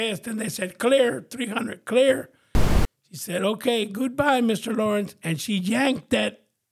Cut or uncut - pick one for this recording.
cut